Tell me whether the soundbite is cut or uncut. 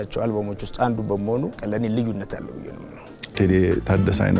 cut